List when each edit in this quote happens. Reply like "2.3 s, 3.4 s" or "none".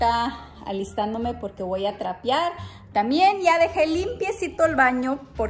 none

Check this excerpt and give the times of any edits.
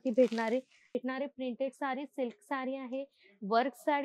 1.0 s

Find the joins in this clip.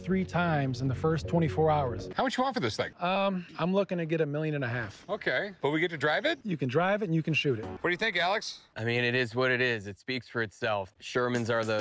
2.0 s, 7.7 s

